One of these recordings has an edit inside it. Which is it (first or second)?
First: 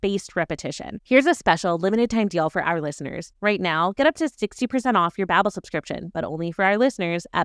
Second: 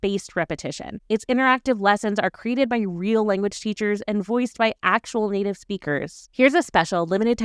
first